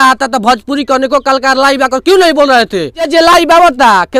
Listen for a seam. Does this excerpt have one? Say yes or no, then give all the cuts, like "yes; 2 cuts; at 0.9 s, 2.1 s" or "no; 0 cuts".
yes; 1 cut; at 3.1 s